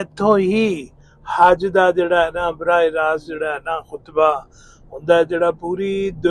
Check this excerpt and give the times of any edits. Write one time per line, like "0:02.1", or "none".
none